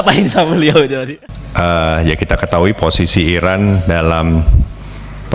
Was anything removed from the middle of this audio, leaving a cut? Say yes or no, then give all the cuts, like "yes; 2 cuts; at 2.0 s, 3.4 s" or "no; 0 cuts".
yes; 1 cut; at 1.0 s